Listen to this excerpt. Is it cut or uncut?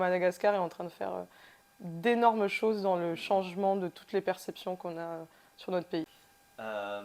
uncut